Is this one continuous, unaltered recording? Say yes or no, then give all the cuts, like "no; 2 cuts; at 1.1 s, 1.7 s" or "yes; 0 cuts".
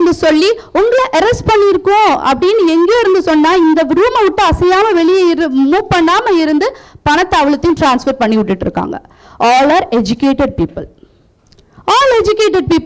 yes; 0 cuts